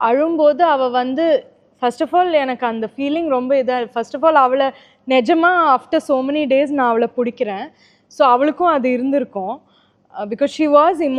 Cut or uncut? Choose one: uncut